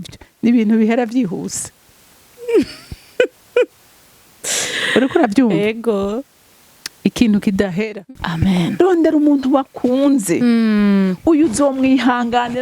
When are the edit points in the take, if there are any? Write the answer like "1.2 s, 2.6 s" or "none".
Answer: 8.0 s